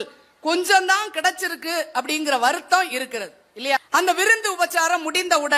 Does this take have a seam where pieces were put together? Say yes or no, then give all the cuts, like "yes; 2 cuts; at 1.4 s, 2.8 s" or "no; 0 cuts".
yes; 1 cut; at 3.8 s